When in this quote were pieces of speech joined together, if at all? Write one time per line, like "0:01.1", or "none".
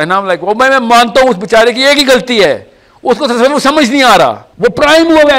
0:04.5